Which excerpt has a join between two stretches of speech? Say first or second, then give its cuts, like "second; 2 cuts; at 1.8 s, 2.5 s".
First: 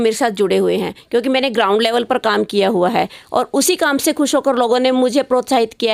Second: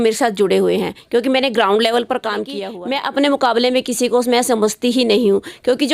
second; 1 cut; at 2.6 s